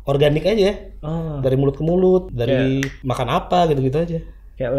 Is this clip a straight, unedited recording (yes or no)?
no